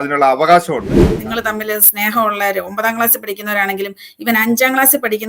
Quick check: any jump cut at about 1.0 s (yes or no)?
yes